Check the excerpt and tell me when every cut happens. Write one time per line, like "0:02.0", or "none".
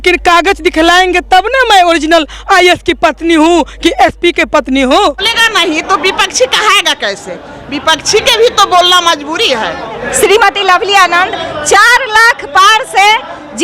0:05.3
0:10.0